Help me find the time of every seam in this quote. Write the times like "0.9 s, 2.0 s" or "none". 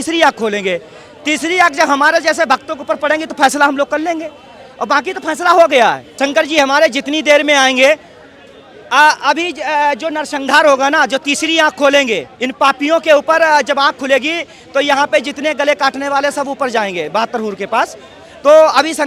6.1 s